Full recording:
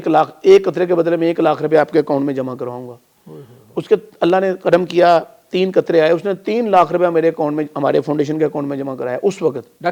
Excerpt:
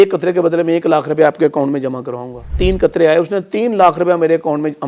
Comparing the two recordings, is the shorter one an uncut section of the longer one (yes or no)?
no